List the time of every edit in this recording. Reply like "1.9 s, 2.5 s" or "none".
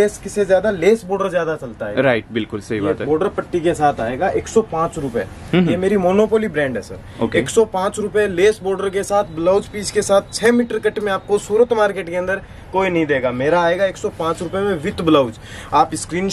none